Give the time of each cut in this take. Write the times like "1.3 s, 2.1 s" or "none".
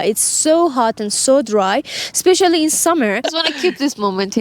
3.2 s